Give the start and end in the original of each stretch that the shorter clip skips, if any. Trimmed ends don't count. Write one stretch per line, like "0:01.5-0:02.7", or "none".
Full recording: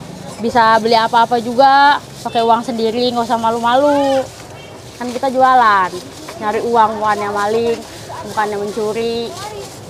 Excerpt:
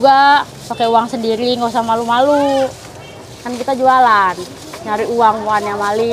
none